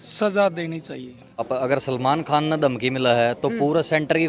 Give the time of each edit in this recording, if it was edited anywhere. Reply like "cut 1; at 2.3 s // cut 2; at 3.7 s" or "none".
cut 1; at 1.5 s